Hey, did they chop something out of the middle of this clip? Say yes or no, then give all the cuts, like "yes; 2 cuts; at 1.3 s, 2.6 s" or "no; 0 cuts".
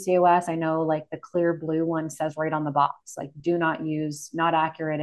no; 0 cuts